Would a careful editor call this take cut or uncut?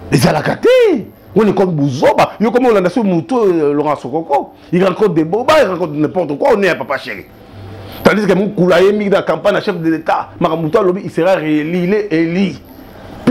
uncut